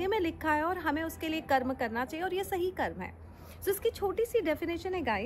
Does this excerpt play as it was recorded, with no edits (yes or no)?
yes